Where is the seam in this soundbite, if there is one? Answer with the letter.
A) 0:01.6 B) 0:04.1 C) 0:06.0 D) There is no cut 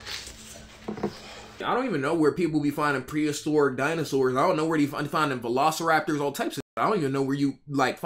A